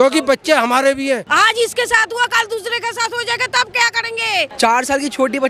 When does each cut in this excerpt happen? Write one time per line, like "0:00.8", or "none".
0:01.3
0:04.5